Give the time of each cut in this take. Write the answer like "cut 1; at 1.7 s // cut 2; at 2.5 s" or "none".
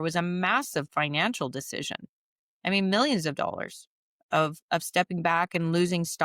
none